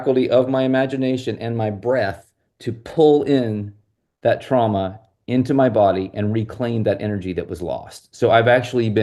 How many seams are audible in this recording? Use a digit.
0